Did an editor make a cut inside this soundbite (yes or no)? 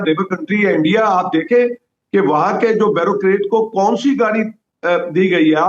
no